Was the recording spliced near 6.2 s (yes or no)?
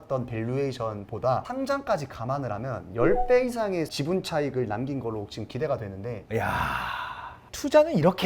yes